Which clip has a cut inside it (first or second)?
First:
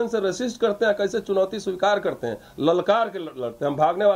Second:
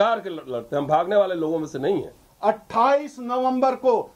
second